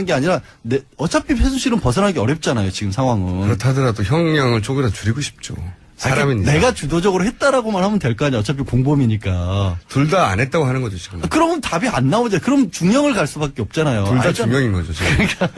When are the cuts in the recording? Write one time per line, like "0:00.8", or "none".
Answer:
0:04.3